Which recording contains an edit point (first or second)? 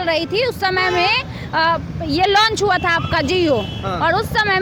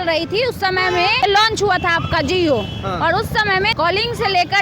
second